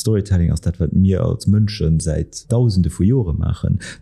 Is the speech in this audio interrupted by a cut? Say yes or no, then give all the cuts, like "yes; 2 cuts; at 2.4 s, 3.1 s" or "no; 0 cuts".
yes; 1 cut; at 2.4 s